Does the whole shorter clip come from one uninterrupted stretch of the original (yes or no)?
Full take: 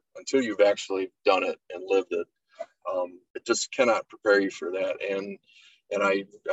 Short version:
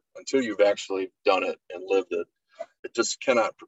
no